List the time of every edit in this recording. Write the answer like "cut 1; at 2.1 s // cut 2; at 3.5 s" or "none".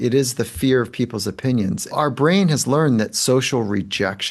cut 1; at 1.9 s